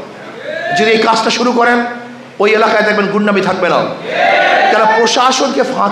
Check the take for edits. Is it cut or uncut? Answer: uncut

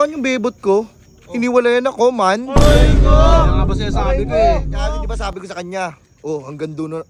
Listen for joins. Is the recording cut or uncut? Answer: uncut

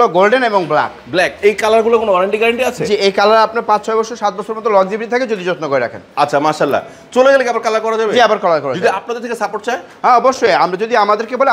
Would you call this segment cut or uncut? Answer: uncut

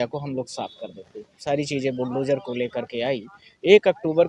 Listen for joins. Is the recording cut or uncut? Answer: cut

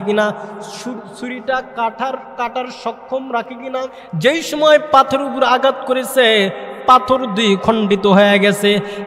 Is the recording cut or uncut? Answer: cut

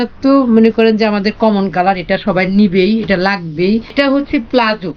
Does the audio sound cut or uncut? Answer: cut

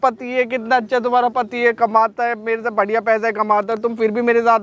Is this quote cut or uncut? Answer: uncut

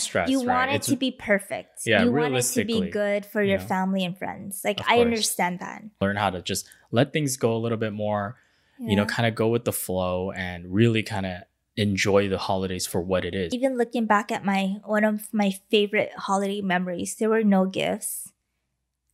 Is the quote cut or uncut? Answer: cut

